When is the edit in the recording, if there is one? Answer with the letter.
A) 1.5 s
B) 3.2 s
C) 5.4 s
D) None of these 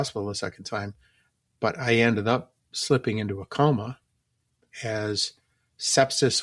D